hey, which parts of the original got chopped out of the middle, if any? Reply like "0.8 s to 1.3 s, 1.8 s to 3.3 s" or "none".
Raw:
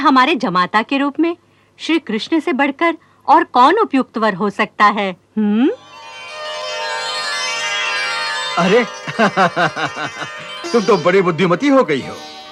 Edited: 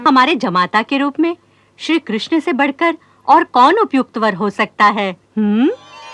none